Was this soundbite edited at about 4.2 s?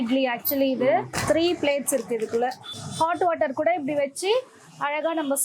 no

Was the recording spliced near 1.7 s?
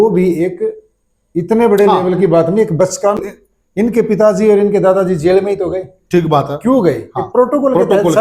no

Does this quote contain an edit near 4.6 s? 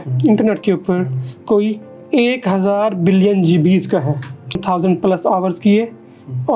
yes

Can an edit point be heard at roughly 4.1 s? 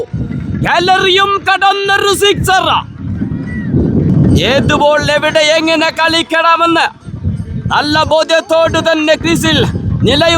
yes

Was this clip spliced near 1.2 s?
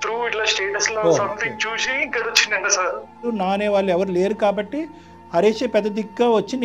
no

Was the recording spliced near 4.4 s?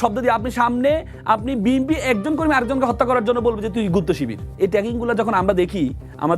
yes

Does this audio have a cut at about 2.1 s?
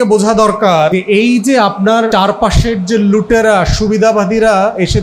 yes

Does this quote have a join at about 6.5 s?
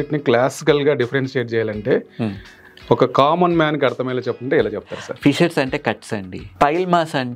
yes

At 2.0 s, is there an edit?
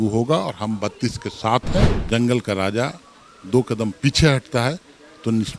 yes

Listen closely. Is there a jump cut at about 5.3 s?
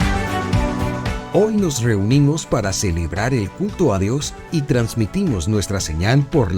no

